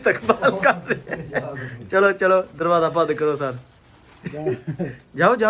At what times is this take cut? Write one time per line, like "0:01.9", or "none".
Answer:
none